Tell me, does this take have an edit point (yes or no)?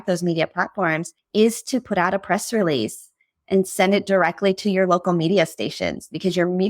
yes